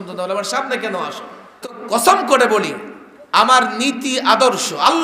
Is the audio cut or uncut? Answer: cut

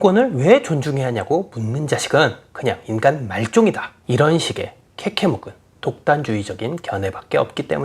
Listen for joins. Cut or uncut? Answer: cut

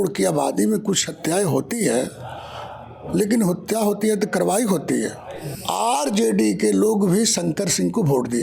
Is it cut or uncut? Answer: cut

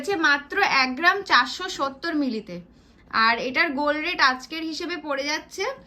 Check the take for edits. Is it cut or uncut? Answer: uncut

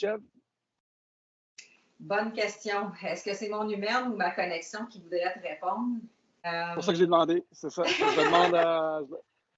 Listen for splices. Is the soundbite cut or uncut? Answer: cut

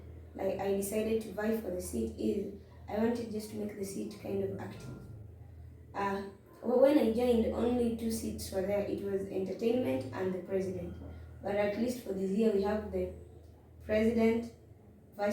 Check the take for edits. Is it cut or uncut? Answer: uncut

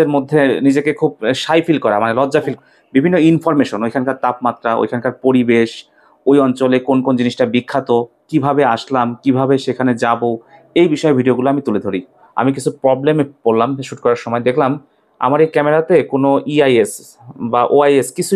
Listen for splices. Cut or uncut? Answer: cut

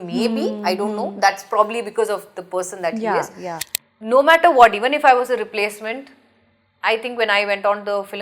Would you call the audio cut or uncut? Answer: cut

